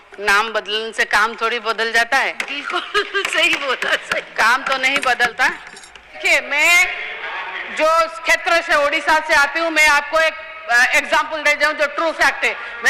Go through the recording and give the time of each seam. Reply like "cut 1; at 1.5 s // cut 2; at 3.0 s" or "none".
cut 1; at 6.2 s